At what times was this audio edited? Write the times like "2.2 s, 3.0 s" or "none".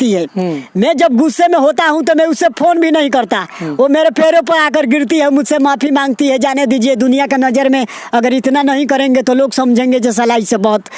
none